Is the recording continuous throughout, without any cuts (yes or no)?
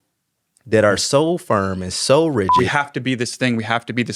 no